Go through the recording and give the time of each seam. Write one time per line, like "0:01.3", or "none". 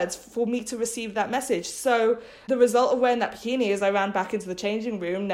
0:02.4